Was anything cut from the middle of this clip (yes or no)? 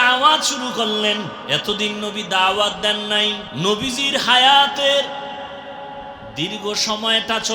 yes